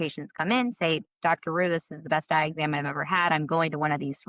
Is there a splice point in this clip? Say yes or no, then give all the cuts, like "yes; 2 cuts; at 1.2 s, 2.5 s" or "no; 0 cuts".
no; 0 cuts